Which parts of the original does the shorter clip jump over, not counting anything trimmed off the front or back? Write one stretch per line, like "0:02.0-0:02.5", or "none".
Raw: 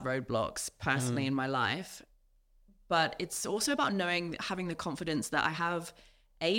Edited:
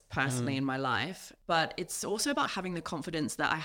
0:02.0-0:02.7
0:03.9-0:04.4

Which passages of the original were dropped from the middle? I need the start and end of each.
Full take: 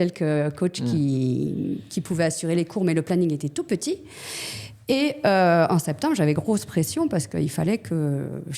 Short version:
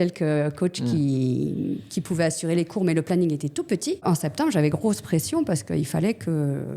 0:04.0-0:05.7

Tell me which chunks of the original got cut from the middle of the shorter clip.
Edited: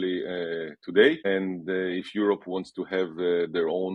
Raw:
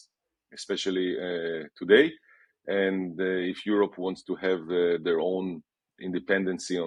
0:02.1-0:02.7

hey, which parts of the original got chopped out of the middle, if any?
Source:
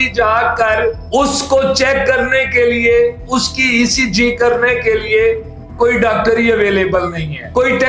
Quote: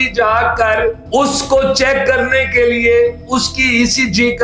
none

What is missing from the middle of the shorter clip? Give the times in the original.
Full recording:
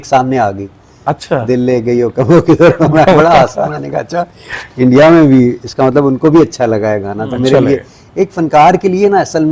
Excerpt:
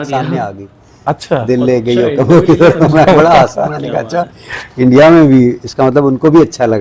none

